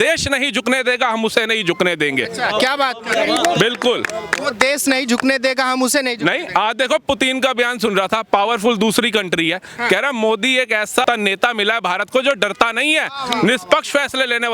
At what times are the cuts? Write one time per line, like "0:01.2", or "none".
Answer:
0:11.0